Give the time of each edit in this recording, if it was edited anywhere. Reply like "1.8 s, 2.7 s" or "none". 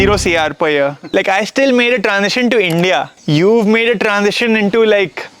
1.1 s, 3.1 s